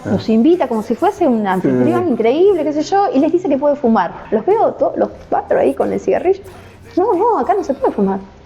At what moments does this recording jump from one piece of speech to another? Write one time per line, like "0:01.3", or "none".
0:04.2

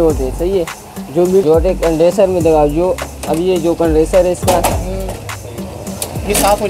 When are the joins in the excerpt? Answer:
0:01.4

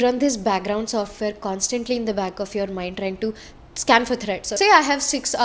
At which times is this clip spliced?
0:04.6

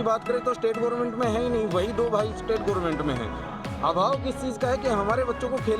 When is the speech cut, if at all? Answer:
none

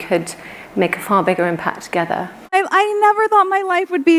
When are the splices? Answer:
0:02.5

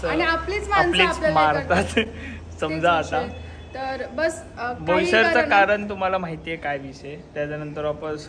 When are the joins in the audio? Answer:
none

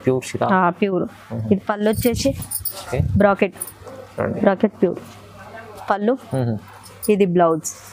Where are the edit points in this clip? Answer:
none

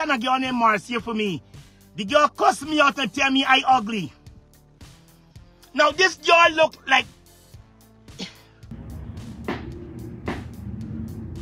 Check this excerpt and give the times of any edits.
0:08.7

